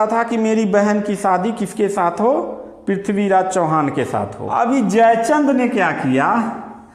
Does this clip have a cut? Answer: yes; 1 cut; at 4.4 s

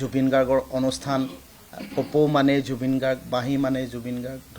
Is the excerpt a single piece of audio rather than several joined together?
yes; 0 cuts

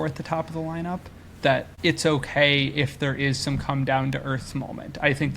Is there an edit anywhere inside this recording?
yes; 1 cut; at 1.7 s

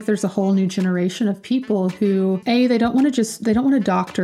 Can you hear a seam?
yes; 1 cut; at 2.4 s

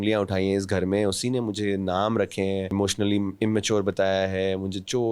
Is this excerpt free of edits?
no; 1 cut; at 2.7 s

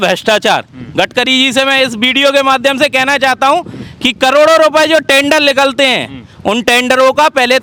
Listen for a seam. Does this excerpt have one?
no; 0 cuts

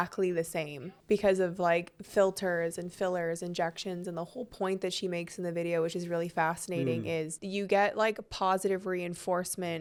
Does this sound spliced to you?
no; 0 cuts

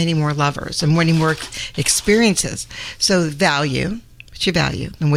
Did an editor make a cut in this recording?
no; 0 cuts

